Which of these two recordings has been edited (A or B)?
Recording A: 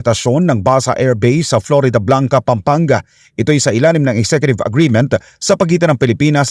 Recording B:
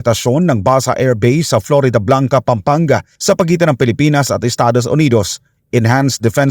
B